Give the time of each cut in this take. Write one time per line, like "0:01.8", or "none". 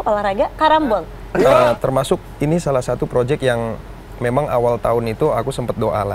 0:01.4